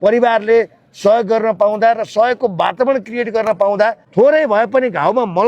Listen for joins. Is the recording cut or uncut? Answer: cut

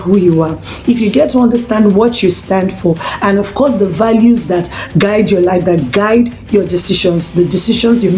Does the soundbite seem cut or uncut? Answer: uncut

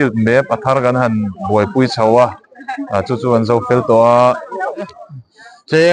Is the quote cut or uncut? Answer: cut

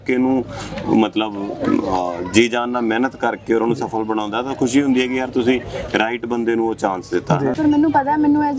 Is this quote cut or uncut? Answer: cut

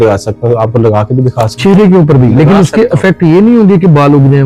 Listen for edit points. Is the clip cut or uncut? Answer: uncut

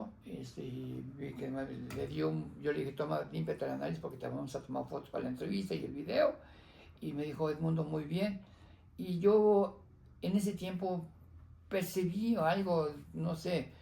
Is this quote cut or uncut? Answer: uncut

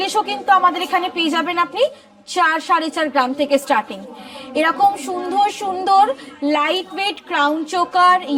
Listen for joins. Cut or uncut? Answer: uncut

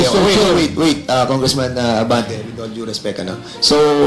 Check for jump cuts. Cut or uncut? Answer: uncut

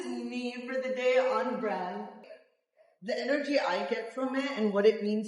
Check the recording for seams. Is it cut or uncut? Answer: cut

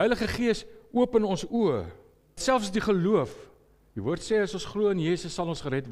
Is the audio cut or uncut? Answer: cut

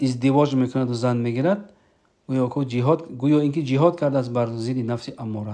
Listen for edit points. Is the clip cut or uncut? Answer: uncut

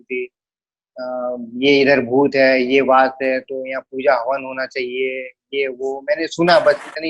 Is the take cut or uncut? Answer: uncut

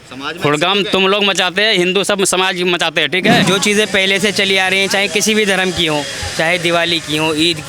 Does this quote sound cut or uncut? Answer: cut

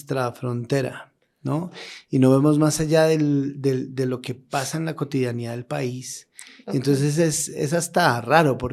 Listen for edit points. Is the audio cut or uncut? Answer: uncut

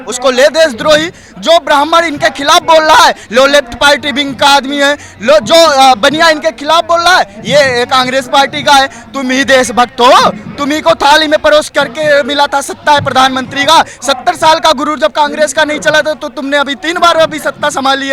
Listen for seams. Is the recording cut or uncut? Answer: uncut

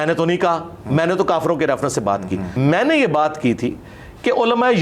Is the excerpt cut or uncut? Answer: cut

